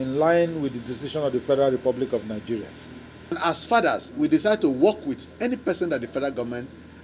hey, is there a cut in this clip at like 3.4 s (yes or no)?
yes